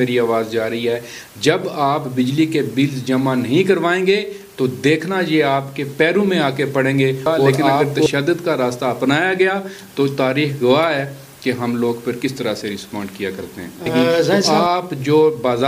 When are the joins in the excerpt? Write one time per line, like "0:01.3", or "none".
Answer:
0:08.1
0:14.5